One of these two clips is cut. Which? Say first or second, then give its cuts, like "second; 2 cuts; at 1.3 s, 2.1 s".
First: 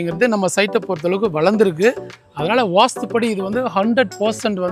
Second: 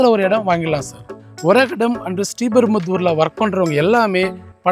second; 1 cut; at 1.2 s